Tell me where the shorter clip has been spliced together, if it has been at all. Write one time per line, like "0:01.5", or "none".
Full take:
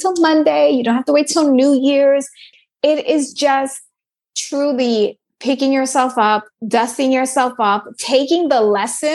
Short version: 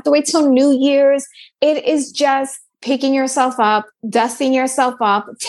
0:01.4
0:02.7